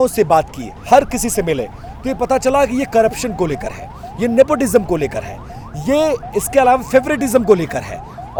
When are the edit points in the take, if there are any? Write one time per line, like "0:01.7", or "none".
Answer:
none